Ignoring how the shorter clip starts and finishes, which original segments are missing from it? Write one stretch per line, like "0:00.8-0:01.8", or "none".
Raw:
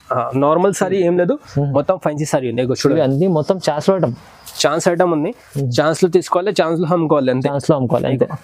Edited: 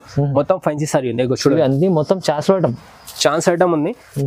none